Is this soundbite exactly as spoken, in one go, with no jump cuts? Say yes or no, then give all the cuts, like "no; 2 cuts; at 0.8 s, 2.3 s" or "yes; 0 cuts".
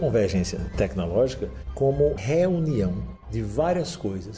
no; 1 cut; at 2.2 s